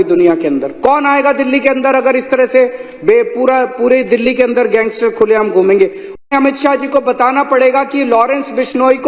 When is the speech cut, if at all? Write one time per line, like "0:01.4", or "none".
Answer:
0:06.2